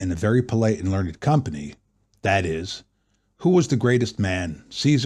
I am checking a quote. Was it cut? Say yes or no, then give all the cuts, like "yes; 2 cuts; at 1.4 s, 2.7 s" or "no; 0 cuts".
no; 0 cuts